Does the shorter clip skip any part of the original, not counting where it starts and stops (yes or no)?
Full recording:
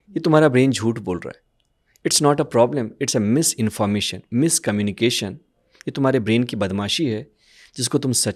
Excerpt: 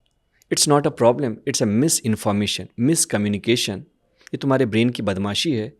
no